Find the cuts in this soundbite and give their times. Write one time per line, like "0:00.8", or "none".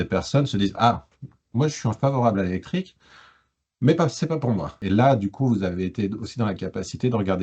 0:04.7